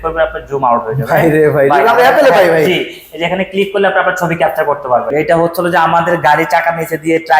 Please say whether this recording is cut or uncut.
cut